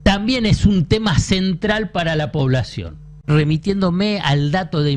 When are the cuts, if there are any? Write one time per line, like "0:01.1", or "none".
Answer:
0:03.1